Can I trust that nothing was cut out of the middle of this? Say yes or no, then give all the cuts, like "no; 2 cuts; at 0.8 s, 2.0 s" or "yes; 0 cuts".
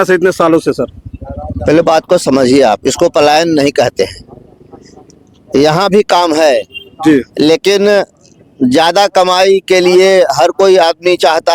yes; 0 cuts